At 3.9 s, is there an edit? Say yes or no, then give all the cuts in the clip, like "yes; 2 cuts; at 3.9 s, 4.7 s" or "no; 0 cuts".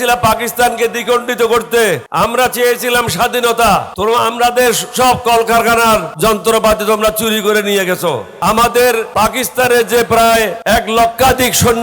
yes; 6 cuts; at 2.1 s, 3.9 s, 6.1 s, 8.3 s, 9.1 s, 10.6 s